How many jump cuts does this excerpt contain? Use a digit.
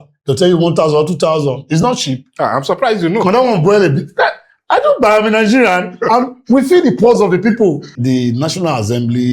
1